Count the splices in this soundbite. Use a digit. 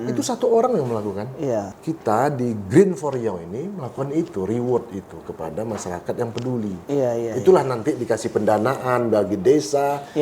1